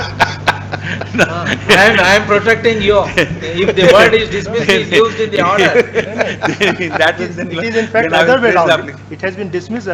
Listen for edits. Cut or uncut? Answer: uncut